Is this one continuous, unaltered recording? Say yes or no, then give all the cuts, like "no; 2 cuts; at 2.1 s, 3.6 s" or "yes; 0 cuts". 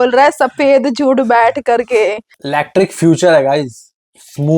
no; 1 cut; at 2.3 s